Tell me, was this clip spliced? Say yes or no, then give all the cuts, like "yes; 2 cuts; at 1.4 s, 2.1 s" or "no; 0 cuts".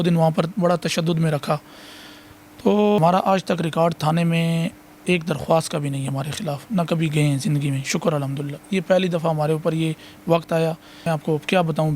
yes; 2 cuts; at 3.0 s, 11.0 s